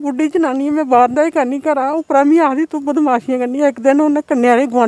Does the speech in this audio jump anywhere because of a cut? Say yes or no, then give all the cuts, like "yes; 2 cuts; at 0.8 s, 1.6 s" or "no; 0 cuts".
no; 0 cuts